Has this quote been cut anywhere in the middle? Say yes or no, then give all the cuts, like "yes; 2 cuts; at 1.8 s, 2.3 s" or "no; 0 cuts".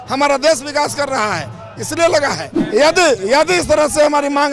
yes; 1 cut; at 2.5 s